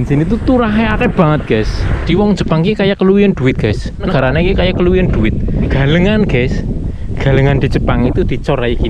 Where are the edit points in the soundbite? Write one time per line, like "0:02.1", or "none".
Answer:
0:02.0
0:04.1
0:05.7